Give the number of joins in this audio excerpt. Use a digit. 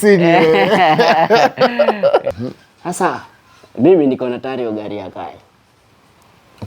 1